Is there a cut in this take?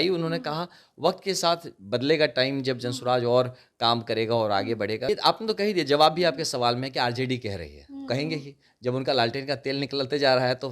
yes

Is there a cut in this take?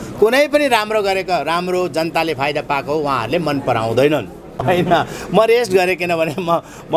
no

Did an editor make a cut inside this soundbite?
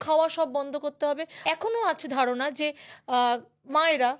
yes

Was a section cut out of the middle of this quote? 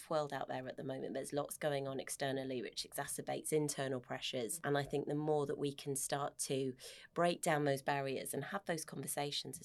yes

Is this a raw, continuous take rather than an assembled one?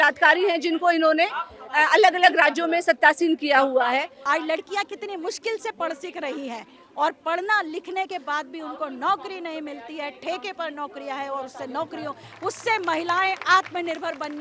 no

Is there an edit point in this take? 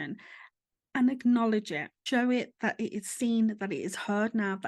yes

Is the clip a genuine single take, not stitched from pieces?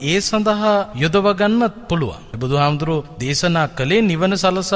no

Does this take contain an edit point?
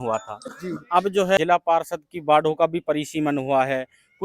yes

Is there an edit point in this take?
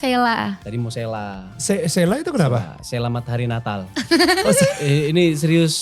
no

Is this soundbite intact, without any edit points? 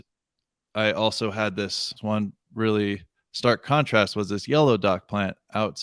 no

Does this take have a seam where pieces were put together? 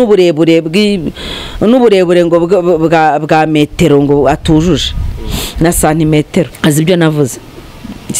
yes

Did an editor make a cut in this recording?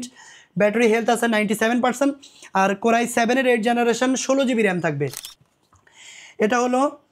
yes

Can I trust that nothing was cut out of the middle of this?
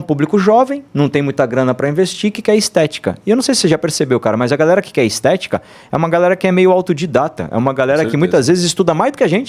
yes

